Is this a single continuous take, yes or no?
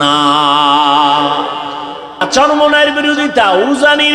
no